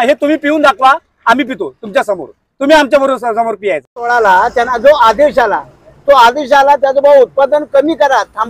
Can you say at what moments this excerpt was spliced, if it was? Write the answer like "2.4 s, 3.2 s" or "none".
3.9 s